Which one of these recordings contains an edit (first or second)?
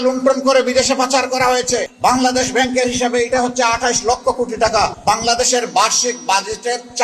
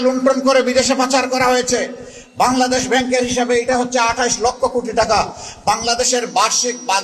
first